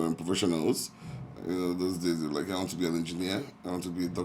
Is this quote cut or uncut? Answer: uncut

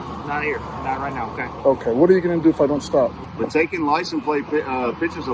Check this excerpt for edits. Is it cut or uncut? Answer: cut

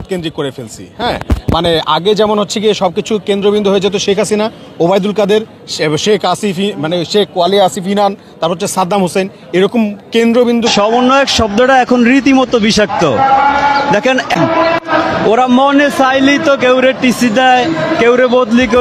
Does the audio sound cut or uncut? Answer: cut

